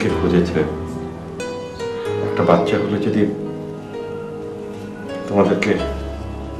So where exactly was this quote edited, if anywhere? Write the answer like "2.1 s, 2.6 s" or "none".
1.4 s